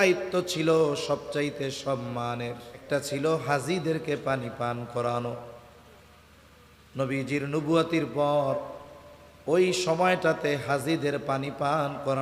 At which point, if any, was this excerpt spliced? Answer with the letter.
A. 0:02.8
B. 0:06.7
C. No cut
A